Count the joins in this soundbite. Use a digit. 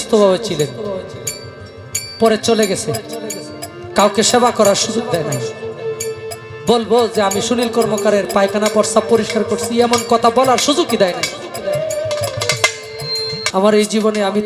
1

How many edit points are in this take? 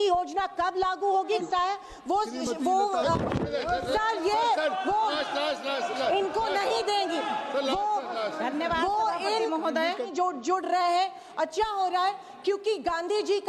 2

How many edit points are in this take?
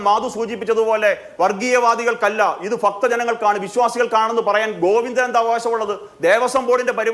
0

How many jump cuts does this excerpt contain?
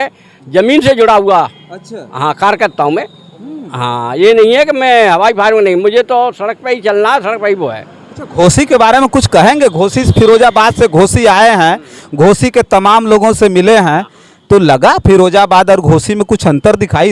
0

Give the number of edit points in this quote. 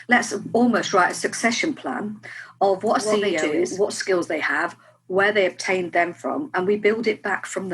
1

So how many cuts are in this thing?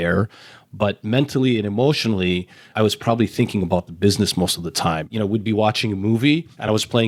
0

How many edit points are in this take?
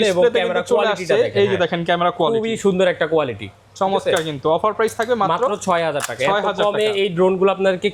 0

